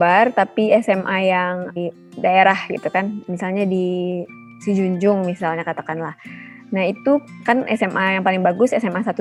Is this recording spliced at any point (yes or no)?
no